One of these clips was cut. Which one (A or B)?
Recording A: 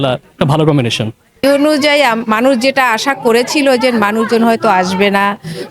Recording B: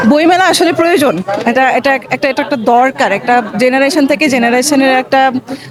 A